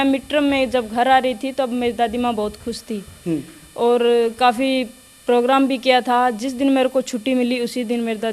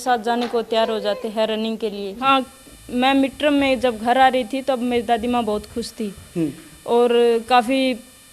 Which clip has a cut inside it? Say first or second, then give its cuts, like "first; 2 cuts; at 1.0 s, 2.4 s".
second; 1 cut; at 2.1 s